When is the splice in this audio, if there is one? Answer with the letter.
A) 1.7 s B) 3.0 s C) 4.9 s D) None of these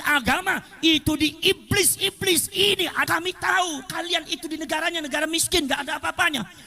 B